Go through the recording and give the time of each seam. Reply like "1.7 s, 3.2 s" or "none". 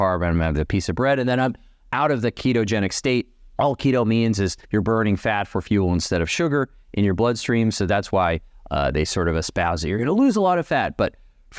none